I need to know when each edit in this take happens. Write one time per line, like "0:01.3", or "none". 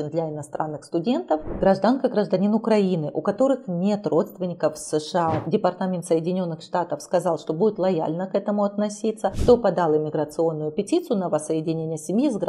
0:01.5
0:05.4
0:09.4